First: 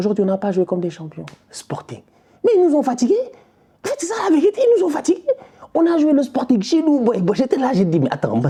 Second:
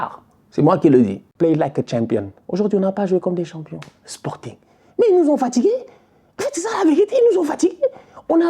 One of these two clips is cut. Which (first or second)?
second